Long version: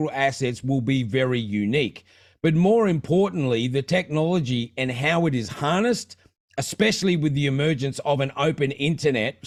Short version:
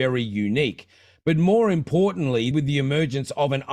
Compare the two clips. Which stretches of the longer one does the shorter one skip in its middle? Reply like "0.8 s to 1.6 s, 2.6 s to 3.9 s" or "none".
3.7 s to 7.2 s

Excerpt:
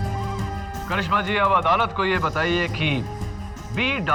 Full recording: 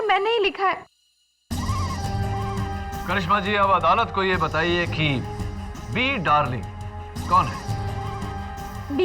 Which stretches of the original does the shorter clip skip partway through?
none

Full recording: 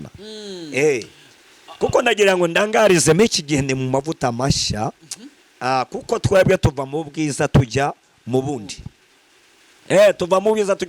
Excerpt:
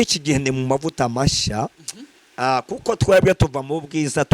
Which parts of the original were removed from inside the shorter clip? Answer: none

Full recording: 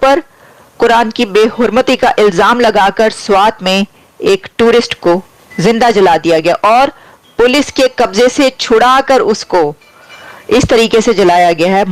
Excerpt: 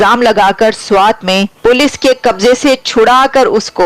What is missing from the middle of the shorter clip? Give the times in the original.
3.9 s to 7.3 s

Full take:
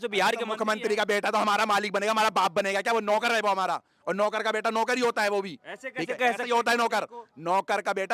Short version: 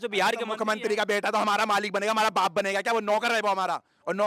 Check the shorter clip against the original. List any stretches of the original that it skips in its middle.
none

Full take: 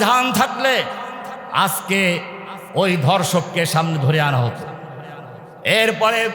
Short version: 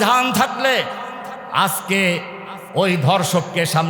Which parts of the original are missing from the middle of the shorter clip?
none

